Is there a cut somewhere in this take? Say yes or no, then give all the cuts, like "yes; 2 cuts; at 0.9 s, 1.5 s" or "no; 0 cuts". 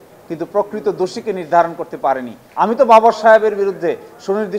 yes; 1 cut; at 2.4 s